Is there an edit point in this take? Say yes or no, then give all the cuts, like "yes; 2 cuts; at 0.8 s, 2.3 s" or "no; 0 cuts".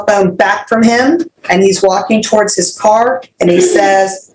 yes; 1 cut; at 1.3 s